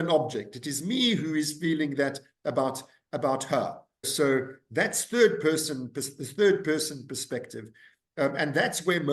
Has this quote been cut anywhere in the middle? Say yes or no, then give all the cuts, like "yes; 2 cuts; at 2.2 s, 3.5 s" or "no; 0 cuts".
yes; 1 cut; at 4.1 s